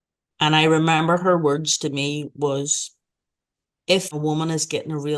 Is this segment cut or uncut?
cut